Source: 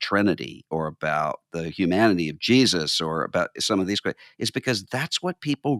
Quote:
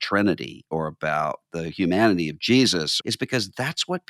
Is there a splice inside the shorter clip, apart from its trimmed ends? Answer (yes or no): yes